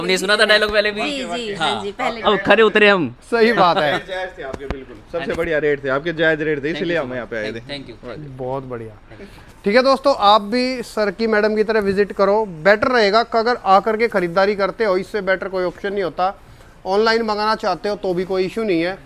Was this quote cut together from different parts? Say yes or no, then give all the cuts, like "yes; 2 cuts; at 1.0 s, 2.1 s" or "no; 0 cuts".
no; 0 cuts